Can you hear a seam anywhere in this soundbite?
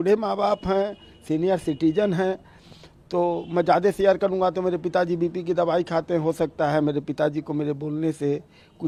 no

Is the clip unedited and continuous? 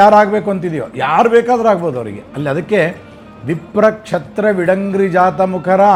yes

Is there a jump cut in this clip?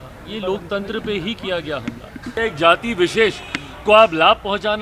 yes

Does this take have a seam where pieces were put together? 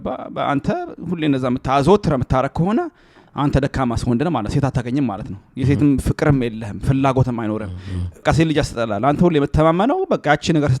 yes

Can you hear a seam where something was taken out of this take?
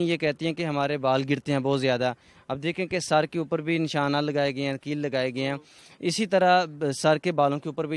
no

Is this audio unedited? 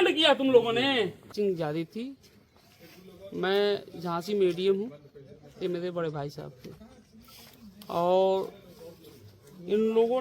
no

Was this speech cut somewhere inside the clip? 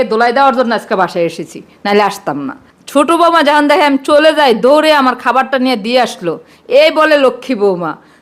no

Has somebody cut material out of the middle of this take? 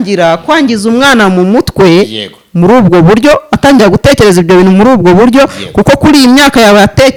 no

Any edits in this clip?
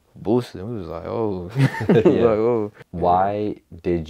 yes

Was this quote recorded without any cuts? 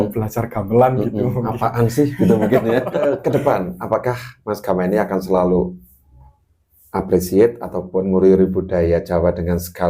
no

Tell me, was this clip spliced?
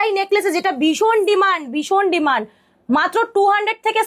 no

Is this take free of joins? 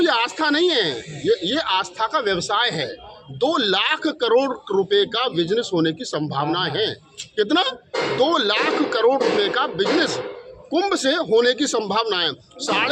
yes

